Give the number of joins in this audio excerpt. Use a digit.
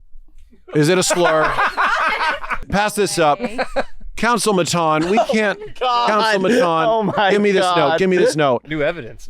1